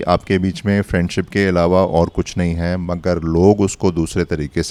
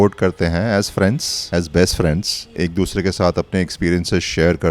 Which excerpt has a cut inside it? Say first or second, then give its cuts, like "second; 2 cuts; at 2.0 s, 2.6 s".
second; 2 cuts; at 1.3 s, 2.6 s